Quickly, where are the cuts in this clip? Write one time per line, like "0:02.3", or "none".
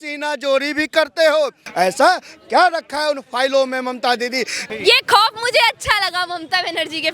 0:01.6
0:04.6